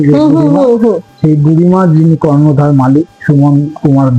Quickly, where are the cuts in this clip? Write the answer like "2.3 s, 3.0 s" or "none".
none